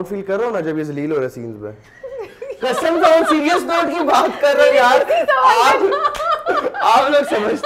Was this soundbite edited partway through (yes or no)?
no